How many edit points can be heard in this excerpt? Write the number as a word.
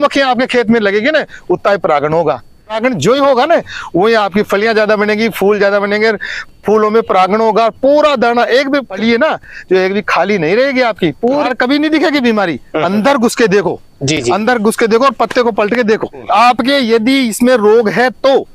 four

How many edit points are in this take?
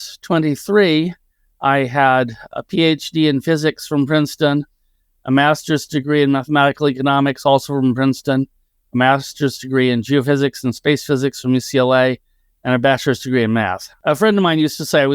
one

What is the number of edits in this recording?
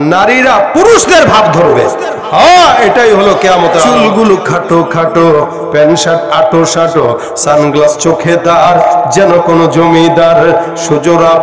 one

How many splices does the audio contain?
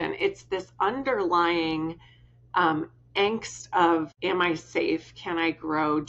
one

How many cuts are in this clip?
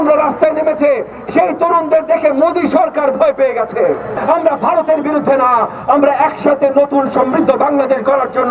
one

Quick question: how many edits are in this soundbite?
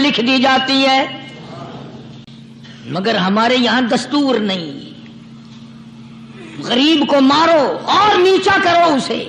one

